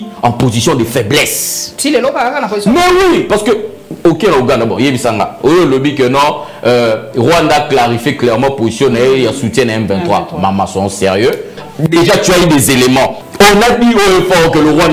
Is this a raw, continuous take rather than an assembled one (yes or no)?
no